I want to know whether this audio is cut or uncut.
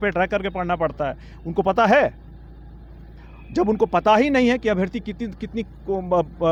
uncut